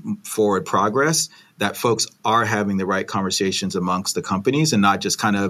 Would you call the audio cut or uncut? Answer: uncut